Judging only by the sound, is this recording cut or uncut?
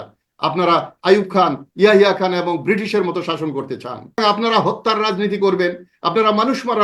cut